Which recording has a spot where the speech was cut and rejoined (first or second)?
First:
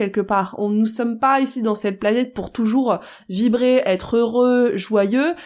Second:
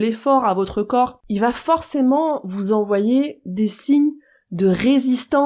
second